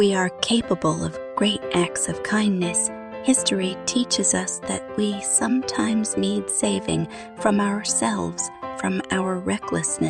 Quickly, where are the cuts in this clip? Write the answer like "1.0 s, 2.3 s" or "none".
none